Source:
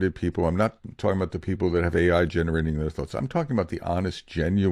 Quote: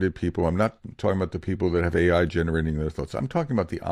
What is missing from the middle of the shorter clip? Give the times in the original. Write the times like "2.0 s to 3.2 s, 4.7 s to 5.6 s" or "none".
none